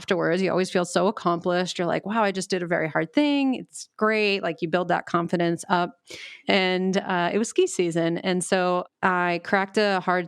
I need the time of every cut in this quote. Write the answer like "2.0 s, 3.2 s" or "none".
6.4 s, 8.9 s